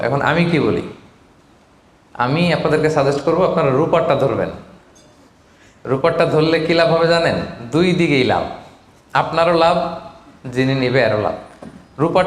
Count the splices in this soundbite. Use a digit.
0